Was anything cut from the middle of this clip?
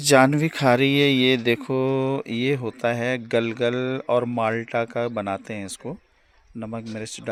no; 0 cuts

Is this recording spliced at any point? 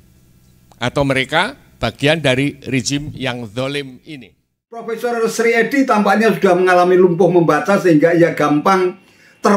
yes; 1 cut; at 4.9 s

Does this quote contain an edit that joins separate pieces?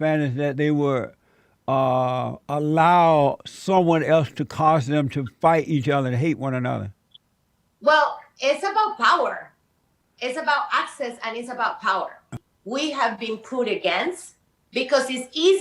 yes; 1 cut; at 12.4 s

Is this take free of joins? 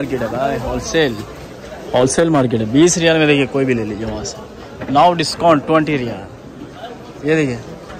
yes; 0 cuts

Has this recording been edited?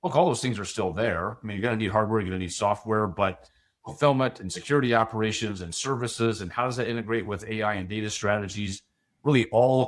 yes; 1 cut; at 3.7 s

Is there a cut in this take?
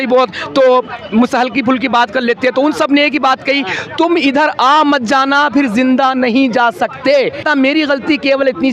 yes; 1 cut; at 7.4 s

